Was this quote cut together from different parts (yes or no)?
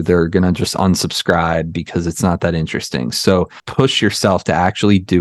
yes